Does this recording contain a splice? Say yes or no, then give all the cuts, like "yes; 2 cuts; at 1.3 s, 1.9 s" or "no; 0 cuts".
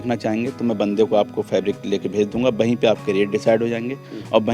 no; 0 cuts